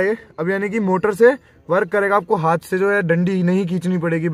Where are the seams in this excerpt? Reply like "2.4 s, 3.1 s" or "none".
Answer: none